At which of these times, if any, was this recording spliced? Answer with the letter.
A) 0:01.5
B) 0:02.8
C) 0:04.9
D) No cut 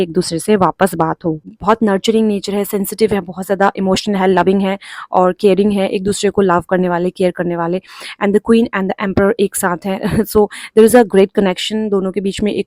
A